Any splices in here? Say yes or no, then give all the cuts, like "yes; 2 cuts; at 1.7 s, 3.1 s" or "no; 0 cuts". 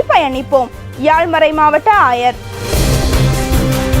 yes; 1 cut; at 2.6 s